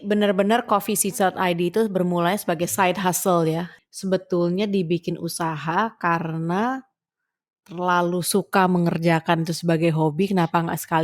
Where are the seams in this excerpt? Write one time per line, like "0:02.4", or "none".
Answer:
0:03.7